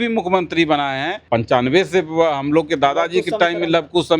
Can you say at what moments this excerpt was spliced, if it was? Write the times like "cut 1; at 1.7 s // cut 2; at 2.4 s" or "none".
cut 1; at 1.2 s